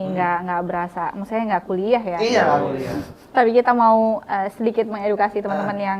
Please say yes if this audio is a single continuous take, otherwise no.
yes